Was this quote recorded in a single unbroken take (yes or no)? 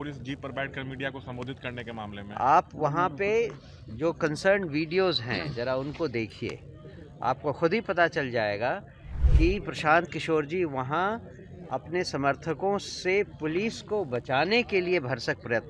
yes